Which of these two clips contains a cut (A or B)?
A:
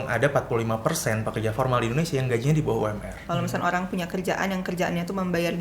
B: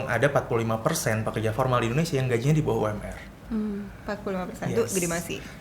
A